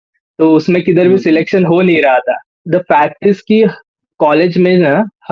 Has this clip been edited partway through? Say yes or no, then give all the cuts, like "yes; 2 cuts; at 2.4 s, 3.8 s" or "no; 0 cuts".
yes; 1 cut; at 2.5 s